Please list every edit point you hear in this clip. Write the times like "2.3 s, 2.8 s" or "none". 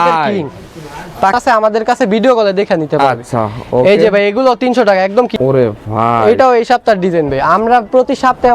1.3 s, 5.3 s